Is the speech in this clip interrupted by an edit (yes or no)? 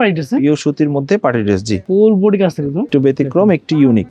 yes